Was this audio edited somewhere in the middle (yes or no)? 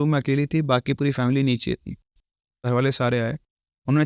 yes